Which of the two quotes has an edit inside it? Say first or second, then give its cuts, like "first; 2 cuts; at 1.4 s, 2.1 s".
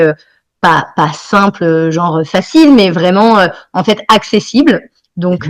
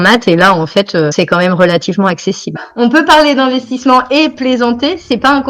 second; 2 cuts; at 1.1 s, 2.7 s